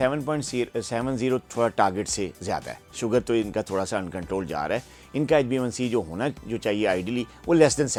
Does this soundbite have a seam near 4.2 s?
no; 0 cuts

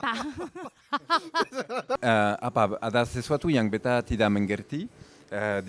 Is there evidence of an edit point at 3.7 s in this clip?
no; 1 cut; at 1.9 s

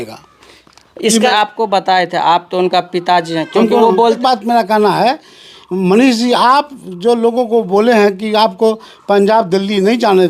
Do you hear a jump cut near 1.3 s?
yes; 2 cuts; at 1.3 s, 4.2 s

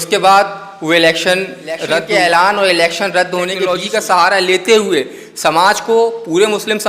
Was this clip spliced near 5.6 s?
no; 2 cuts; at 2.0 s, 3.7 s

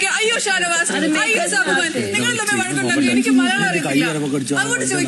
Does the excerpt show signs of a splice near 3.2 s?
no; 0 cuts

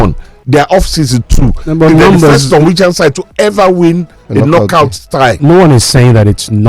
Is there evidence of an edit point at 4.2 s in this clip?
yes; 2 cuts; at 4.2 s, 5.4 s

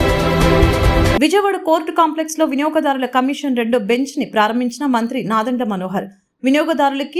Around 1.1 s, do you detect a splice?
yes; 1 cut; at 1.1 s

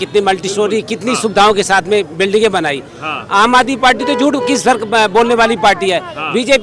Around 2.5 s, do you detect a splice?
no; 0 cuts

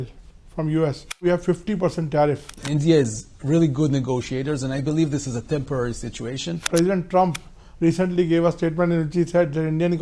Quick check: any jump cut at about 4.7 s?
no; 3 cuts; at 1.2 s, 2.6 s, 6.7 s

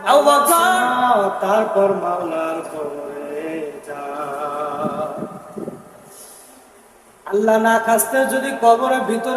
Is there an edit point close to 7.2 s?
no; 1 cut; at 0.9 s

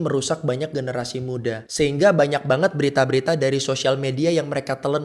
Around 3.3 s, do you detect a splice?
no; 1 cut; at 1.6 s

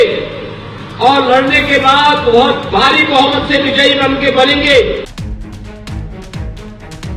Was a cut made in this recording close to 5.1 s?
yes; 1 cut; at 5.1 s

